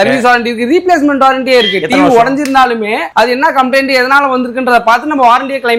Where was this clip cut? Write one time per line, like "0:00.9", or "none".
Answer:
none